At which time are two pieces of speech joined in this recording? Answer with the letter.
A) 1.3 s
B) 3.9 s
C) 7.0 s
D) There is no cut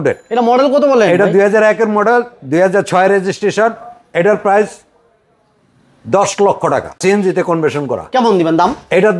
C